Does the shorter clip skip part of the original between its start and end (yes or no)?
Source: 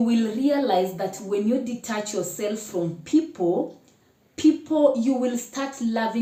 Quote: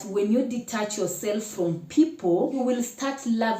yes